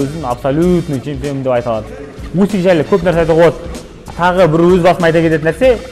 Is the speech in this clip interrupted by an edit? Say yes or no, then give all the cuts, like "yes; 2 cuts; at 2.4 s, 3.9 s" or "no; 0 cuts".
yes; 1 cut; at 2.2 s